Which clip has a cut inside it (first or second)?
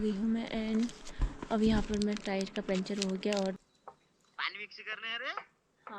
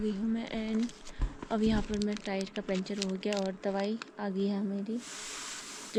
first